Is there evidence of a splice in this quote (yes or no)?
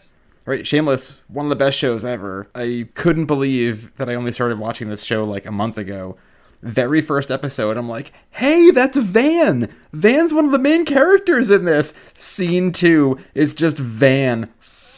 yes